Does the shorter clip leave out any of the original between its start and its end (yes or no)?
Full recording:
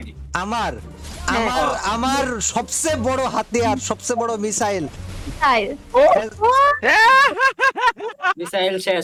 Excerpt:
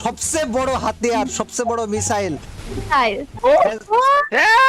no